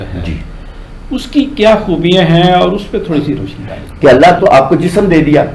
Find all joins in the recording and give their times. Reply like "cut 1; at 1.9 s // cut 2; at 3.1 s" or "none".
cut 1; at 3.8 s